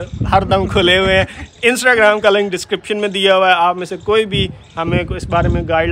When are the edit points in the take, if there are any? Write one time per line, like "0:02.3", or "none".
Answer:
none